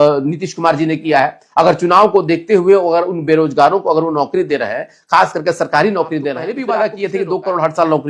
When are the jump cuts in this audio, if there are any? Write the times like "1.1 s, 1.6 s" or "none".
6.5 s